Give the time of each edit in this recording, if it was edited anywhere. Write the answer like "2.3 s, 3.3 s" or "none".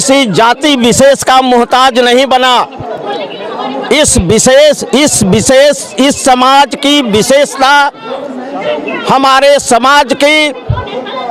none

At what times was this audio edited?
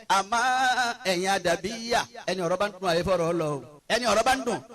3.7 s

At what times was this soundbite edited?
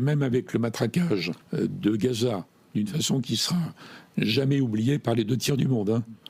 1.3 s

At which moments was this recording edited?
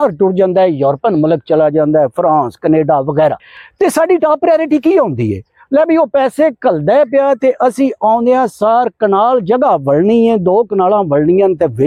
none

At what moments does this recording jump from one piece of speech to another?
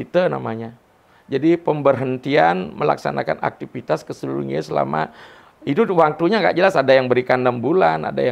none

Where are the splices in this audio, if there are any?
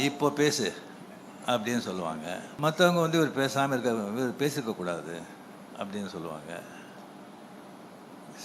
2.5 s

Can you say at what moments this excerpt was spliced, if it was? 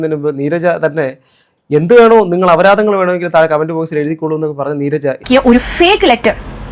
5.2 s

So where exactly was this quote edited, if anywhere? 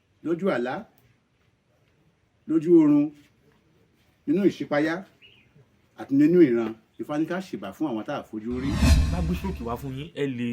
8.9 s

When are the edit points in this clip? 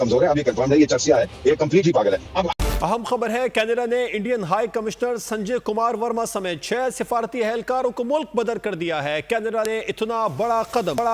2.5 s

